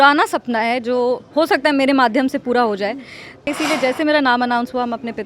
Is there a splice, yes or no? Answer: yes